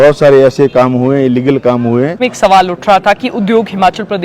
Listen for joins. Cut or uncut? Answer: cut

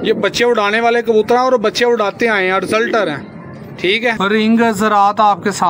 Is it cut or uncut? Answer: cut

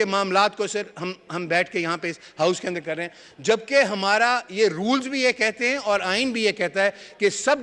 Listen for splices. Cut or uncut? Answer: uncut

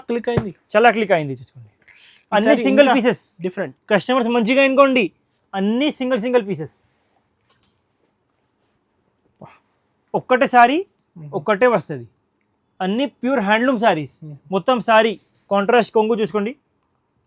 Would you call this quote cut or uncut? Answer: uncut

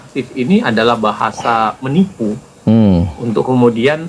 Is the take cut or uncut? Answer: uncut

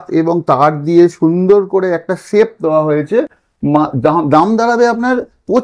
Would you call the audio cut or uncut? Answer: uncut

